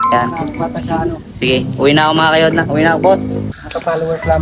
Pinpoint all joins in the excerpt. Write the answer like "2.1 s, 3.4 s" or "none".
3.5 s